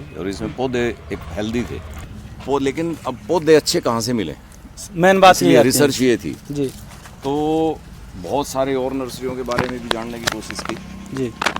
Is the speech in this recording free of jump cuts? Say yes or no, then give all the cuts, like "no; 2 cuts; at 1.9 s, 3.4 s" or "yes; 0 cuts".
no; 1 cut; at 1.9 s